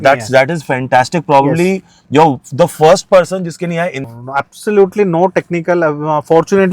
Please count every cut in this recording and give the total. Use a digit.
1